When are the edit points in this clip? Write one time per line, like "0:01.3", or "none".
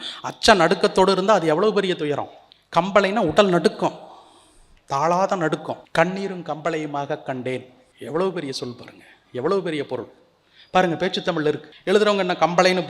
0:05.8
0:11.7